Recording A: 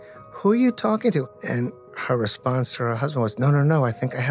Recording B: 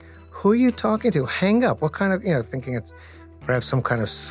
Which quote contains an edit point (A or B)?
A